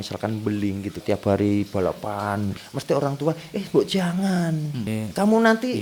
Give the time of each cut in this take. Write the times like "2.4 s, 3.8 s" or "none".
1.0 s, 2.5 s, 4.9 s